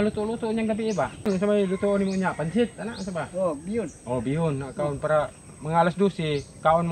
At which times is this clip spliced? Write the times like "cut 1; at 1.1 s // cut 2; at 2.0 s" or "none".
cut 1; at 1.4 s